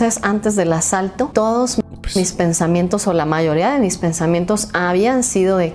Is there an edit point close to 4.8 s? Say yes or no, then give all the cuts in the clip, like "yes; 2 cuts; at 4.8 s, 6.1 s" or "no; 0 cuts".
no; 1 cut; at 1.3 s